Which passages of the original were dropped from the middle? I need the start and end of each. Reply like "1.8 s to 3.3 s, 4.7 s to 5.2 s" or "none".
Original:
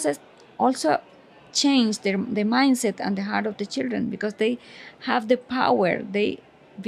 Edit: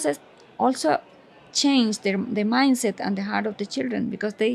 none

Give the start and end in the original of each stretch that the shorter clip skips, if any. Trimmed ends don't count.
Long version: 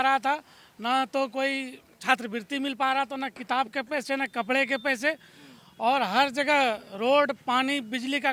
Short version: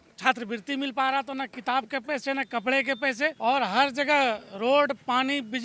5.2 s to 5.8 s

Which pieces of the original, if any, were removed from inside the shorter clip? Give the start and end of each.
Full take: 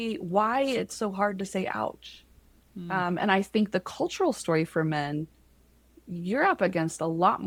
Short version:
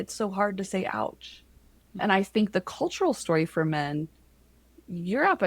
2.8 s to 3.2 s

